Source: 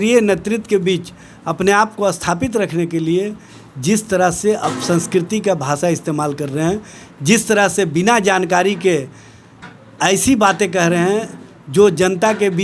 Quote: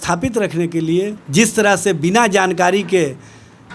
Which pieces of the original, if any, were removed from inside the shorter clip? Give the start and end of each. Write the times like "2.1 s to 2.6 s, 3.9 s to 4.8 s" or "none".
3.4 s to 7.1 s